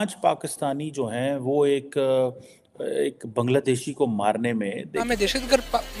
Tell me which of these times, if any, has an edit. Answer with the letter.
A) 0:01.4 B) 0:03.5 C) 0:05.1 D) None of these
C